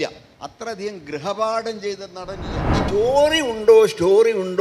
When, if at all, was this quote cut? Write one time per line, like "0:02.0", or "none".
0:02.7